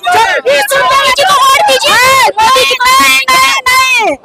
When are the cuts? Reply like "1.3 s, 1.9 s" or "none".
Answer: none